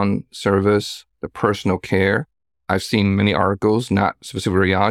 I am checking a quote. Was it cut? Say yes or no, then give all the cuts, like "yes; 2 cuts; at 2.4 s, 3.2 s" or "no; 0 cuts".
no; 0 cuts